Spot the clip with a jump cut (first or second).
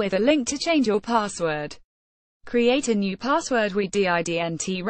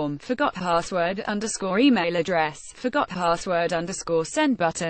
first